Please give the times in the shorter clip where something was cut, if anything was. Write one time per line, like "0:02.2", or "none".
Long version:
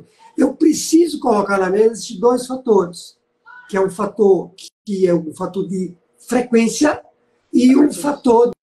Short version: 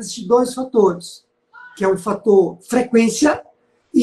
0:02.6